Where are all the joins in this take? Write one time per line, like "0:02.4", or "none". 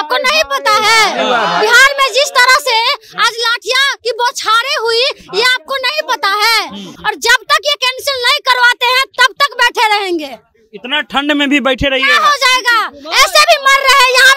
0:06.9